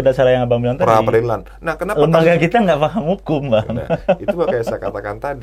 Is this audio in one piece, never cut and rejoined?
yes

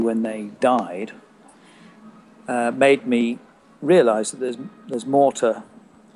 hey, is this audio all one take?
yes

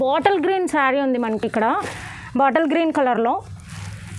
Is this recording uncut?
yes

